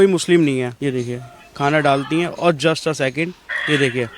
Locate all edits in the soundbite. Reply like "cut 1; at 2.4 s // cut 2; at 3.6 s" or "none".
none